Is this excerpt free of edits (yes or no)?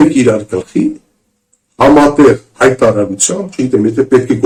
yes